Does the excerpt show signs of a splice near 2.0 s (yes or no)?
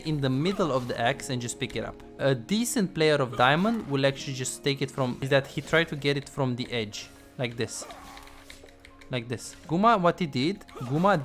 yes